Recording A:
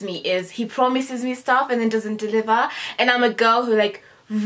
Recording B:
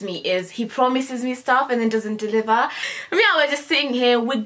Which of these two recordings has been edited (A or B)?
B